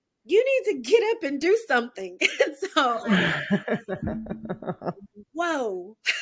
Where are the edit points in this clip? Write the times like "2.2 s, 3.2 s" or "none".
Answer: 3.0 s